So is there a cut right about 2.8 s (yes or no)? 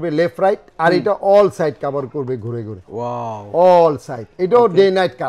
no